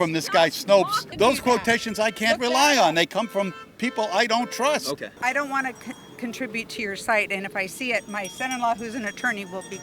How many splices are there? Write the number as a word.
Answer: two